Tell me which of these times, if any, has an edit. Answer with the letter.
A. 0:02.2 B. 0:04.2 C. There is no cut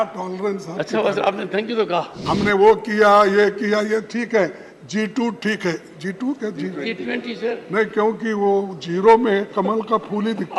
A